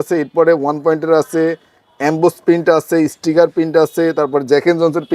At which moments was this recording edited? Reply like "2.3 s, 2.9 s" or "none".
none